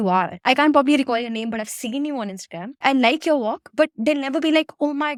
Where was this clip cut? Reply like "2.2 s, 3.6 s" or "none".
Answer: none